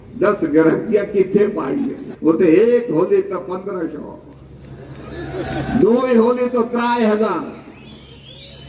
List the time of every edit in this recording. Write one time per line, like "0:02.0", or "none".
0:02.0